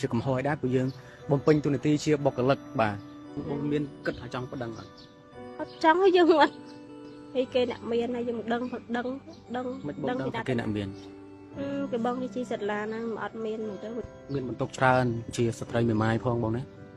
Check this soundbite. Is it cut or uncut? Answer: cut